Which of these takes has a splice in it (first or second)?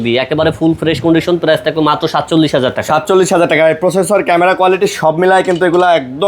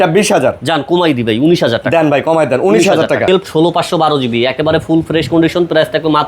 second